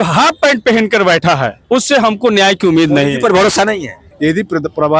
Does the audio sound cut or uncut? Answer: cut